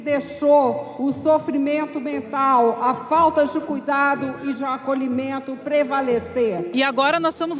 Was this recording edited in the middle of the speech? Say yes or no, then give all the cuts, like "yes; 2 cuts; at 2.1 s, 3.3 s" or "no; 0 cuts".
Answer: yes; 1 cut; at 6.6 s